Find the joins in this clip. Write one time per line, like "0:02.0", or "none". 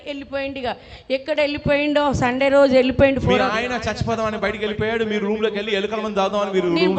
none